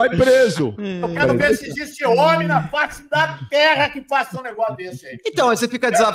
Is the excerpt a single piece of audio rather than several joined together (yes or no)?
no